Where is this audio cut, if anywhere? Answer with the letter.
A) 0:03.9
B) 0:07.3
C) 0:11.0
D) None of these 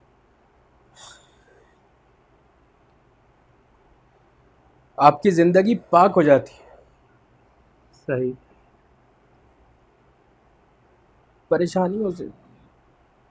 A